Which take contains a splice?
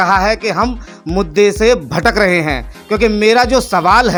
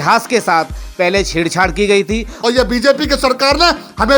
second; 1 cut; at 2.3 s

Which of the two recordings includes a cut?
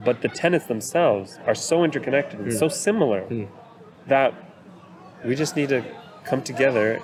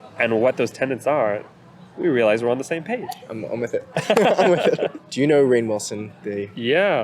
second; 1 cut; at 5.0 s

